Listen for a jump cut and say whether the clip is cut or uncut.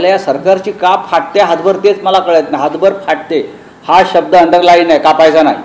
uncut